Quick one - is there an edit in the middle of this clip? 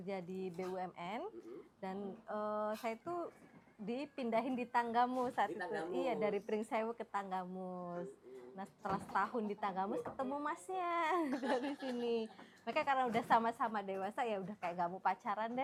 no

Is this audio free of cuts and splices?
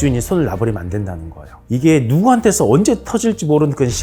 no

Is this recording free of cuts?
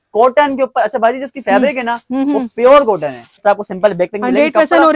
no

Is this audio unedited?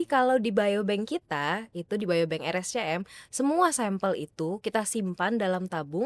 yes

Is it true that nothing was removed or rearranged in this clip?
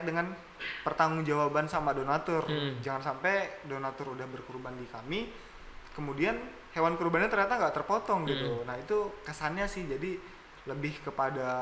yes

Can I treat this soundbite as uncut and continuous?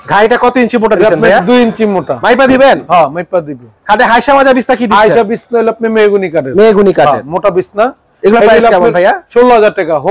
yes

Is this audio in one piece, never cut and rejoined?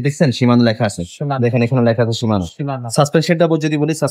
yes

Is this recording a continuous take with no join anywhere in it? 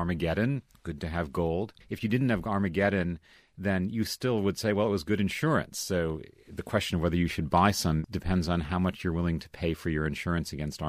no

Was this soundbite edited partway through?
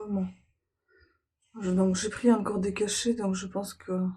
no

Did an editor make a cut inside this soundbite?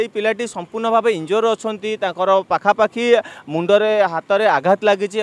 no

